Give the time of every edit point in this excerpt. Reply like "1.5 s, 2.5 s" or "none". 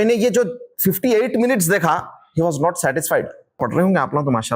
3.6 s